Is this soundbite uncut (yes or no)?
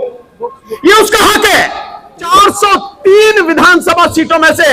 no